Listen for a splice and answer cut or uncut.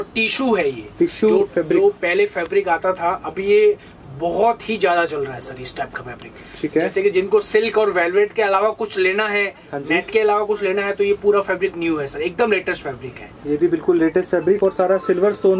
uncut